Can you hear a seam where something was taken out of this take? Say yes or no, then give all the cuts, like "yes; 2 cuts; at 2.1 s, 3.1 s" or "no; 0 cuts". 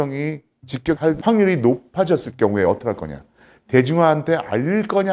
yes; 1 cut; at 1.0 s